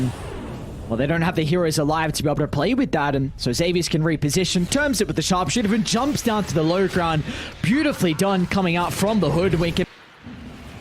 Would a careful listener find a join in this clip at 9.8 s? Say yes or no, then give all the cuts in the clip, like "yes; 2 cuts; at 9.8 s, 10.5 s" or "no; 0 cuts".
yes; 1 cut; at 9.8 s